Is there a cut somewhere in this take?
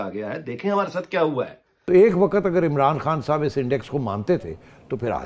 yes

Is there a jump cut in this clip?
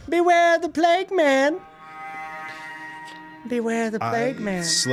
no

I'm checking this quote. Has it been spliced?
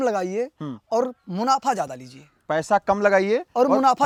no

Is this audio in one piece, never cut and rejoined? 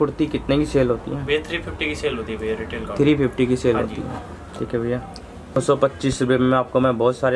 no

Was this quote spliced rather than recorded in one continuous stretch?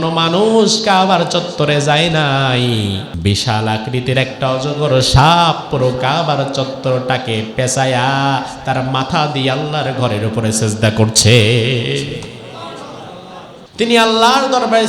yes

